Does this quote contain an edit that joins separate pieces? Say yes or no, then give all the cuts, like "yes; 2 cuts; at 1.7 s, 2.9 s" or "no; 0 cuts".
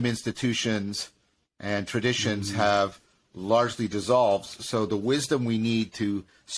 no; 0 cuts